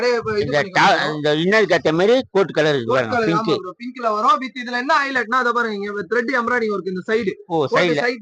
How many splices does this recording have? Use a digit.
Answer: 0